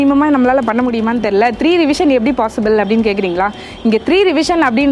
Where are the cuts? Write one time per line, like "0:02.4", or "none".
none